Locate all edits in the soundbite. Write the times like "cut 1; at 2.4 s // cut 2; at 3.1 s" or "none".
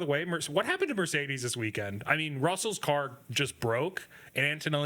none